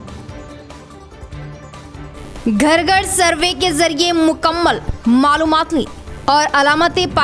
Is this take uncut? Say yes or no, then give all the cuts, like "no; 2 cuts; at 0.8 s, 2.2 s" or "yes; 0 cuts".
yes; 0 cuts